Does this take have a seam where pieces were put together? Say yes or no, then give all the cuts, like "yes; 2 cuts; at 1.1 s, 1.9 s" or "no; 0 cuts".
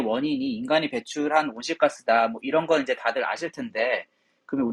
no; 0 cuts